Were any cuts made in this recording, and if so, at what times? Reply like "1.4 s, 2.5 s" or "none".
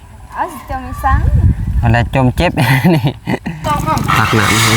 3.6 s